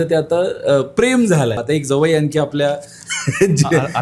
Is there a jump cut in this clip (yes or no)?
yes